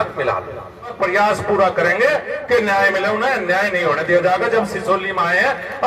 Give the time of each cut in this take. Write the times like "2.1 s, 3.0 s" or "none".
0.9 s